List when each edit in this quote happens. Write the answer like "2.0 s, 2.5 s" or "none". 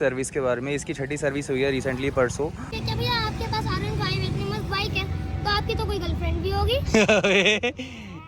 2.7 s